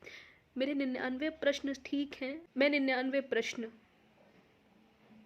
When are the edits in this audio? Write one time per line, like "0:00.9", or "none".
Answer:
0:02.4